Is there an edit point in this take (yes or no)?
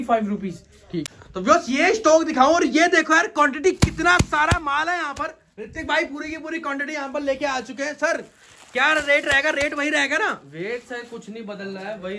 yes